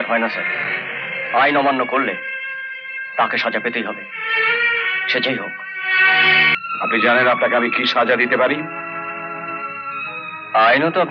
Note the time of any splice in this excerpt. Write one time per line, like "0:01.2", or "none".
0:06.6